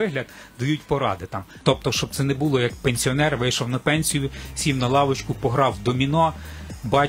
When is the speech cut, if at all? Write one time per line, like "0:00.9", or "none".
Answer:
0:01.5